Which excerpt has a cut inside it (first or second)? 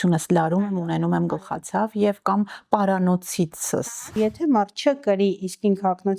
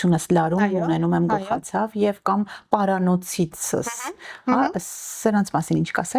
first